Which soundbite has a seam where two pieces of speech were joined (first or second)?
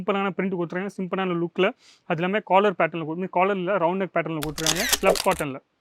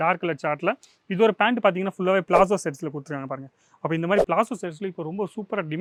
first